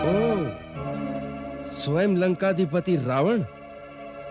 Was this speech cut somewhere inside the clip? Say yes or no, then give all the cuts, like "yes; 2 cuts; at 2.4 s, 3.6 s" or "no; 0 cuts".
no; 0 cuts